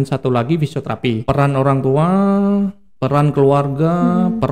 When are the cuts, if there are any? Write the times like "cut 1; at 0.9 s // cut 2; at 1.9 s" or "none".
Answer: cut 1; at 1.2 s

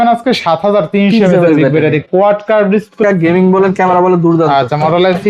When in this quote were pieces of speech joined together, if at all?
cut 1; at 3.0 s

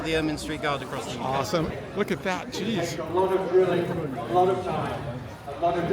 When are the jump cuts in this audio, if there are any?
cut 1; at 1.7 s

